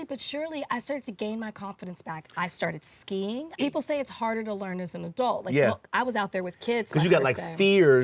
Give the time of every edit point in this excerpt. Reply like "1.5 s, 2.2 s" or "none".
3.5 s